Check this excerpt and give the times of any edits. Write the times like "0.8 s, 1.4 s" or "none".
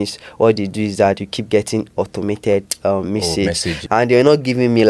3.8 s

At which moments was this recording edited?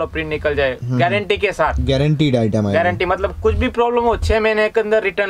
none

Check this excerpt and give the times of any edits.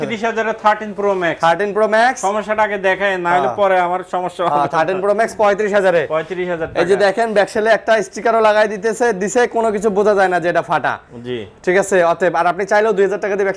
none

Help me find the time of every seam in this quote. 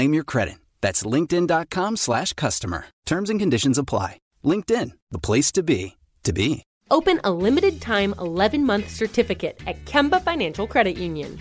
6.7 s

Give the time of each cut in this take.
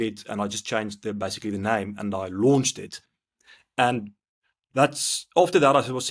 none

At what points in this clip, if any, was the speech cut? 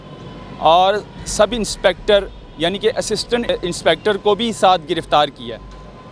3.5 s

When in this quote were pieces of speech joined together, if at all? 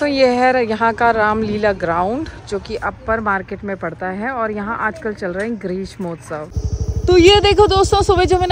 6.8 s

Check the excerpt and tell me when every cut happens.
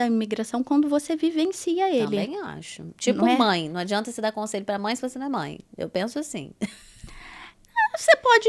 none

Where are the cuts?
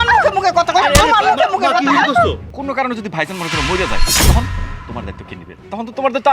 2.5 s

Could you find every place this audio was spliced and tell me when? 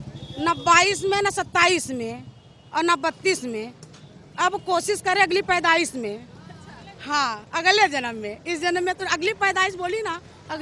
none

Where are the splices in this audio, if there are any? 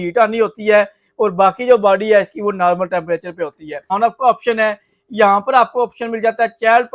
3.9 s

